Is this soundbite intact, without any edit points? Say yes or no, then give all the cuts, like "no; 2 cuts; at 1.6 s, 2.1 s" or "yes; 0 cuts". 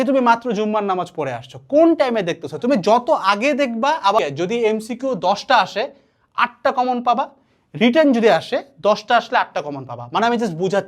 no; 1 cut; at 4.2 s